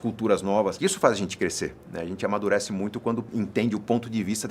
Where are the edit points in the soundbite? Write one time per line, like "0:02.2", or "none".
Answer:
0:00.8
0:03.3

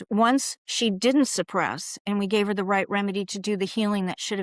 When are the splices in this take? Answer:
none

